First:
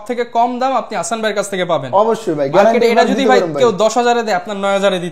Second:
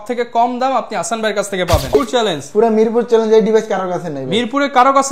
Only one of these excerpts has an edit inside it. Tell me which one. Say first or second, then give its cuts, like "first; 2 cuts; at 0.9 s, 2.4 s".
second; 1 cut; at 1.9 s